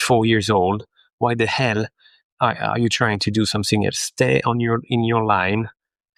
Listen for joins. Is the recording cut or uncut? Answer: uncut